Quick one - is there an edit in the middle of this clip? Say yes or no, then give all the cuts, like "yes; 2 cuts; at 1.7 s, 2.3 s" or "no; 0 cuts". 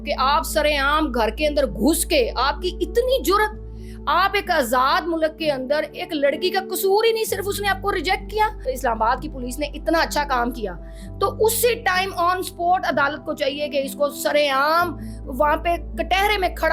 yes; 1 cut; at 8.6 s